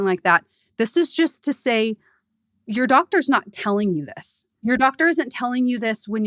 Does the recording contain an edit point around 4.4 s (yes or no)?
yes